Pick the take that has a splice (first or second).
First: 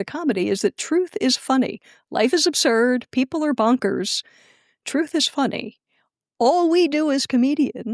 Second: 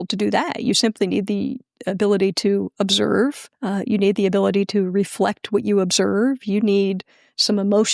second